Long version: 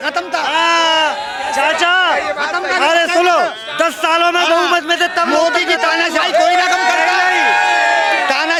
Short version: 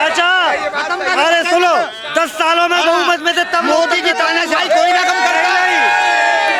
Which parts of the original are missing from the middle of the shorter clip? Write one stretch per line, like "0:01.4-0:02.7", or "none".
none